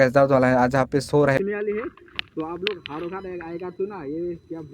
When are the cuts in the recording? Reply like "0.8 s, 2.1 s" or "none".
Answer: 1.4 s